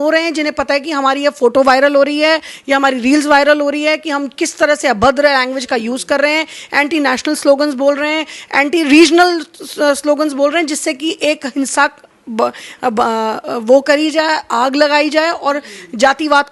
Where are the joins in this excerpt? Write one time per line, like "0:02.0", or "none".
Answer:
none